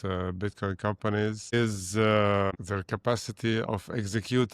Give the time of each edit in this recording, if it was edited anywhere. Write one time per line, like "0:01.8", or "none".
0:01.5
0:02.5